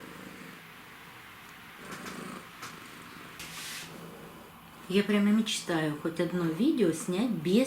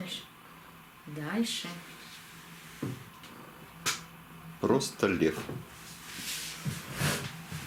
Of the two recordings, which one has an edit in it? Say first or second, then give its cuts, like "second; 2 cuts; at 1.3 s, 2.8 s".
first; 1 cut; at 3.4 s